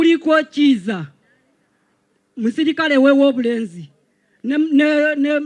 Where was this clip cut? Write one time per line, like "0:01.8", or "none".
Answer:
none